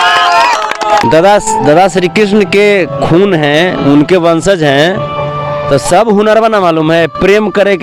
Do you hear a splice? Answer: yes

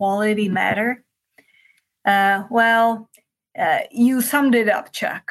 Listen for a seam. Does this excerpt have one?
no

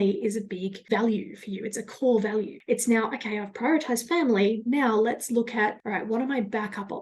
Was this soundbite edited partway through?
yes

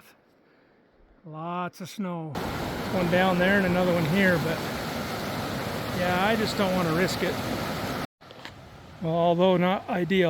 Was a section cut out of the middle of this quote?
yes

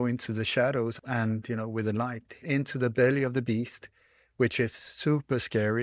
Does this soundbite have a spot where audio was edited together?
yes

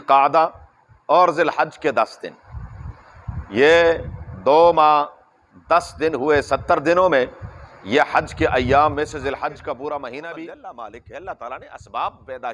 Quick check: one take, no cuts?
no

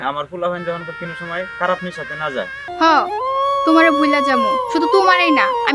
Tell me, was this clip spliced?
yes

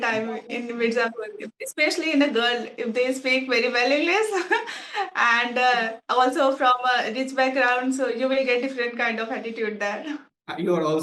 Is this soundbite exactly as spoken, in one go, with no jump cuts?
yes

